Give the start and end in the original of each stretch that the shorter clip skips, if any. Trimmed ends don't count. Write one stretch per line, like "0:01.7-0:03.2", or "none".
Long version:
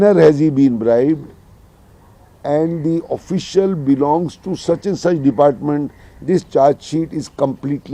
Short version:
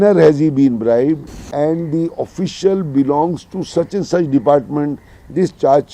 0:01.4-0:02.3